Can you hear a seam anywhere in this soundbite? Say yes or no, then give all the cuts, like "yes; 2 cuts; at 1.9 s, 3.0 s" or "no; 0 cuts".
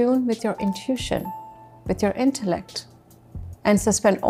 no; 0 cuts